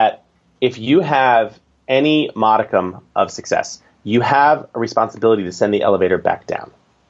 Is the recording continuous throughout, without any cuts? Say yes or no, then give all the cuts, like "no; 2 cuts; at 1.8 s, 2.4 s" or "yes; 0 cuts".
yes; 0 cuts